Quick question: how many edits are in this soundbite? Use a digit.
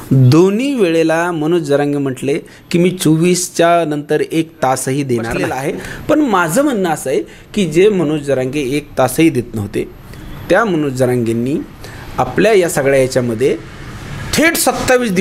1